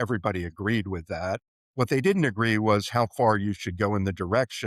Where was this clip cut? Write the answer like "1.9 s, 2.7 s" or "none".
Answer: 1.6 s